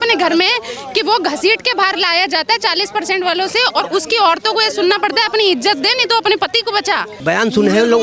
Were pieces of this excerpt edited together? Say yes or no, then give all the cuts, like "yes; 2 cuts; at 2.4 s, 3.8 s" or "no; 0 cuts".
yes; 1 cut; at 7.1 s